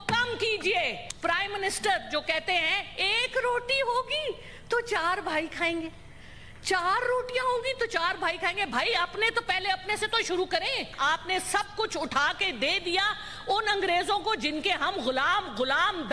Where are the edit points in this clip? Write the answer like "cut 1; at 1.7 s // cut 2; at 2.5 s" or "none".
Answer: cut 1; at 1.0 s // cut 2; at 10.9 s